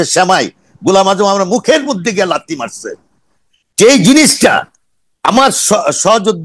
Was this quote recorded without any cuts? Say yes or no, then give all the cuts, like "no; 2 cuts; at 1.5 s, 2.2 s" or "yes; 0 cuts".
yes; 0 cuts